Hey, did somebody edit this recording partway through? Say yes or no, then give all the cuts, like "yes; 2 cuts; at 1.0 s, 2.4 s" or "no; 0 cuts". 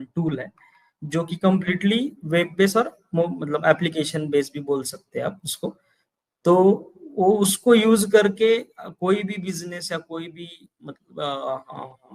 no; 0 cuts